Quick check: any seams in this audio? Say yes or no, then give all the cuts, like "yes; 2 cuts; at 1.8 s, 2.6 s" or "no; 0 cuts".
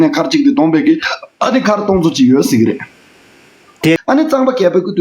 yes; 1 cut; at 4.0 s